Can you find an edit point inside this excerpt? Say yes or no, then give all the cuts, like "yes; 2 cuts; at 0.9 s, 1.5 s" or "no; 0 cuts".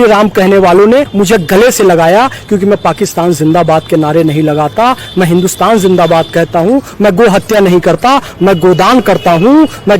yes; 1 cut; at 1.1 s